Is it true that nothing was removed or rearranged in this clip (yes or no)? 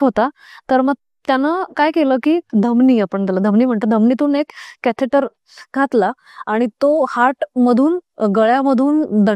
no